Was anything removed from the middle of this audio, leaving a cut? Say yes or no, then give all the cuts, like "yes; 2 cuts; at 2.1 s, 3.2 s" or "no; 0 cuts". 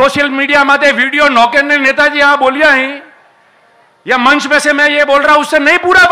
no; 0 cuts